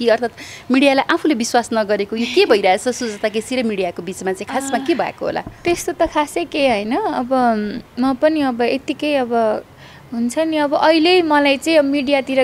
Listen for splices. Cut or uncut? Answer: uncut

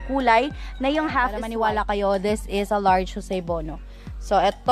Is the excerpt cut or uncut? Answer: cut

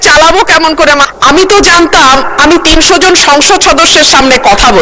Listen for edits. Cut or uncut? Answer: cut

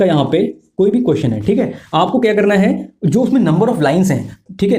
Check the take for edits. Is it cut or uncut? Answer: uncut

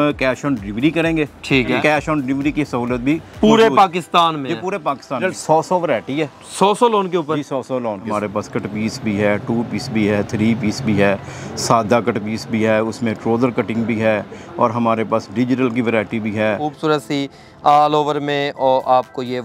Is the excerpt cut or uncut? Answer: cut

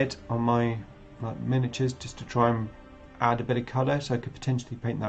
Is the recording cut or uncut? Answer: uncut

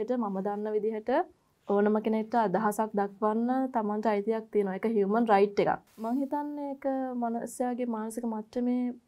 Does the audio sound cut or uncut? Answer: cut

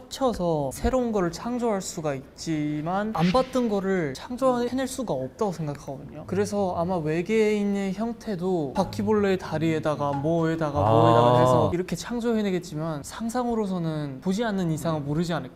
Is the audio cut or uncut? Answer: uncut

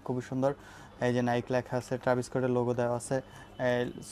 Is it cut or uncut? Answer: uncut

